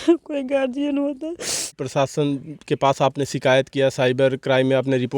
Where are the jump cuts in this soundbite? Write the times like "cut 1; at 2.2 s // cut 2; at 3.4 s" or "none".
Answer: cut 1; at 1.8 s